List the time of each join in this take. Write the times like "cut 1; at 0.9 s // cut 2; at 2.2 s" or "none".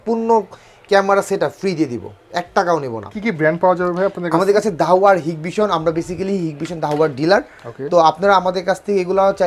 none